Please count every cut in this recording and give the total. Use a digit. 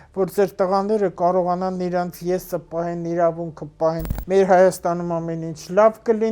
1